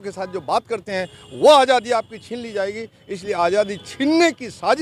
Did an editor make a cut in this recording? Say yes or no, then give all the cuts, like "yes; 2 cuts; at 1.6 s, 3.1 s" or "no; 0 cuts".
no; 0 cuts